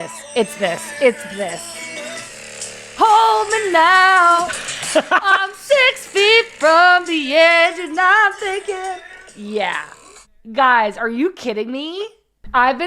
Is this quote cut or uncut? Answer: cut